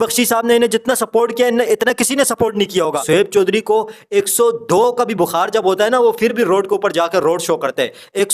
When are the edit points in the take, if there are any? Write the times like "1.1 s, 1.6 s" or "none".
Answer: 3.0 s